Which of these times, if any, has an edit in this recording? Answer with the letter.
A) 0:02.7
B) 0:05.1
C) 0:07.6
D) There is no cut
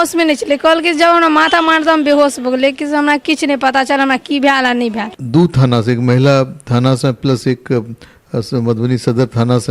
B